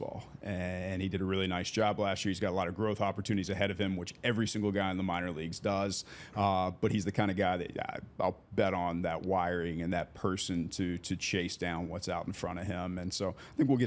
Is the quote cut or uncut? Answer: uncut